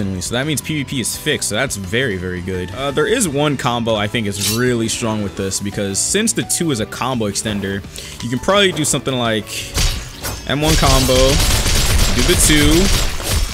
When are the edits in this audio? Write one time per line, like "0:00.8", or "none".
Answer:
0:02.7